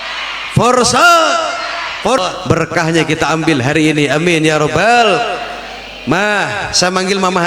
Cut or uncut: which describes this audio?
cut